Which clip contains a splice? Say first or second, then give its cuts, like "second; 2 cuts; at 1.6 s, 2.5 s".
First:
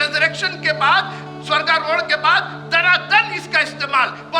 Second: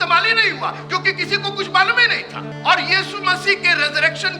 second; 1 cut; at 2.5 s